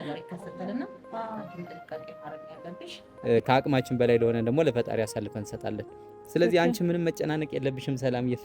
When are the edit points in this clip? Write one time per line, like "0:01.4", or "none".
0:03.1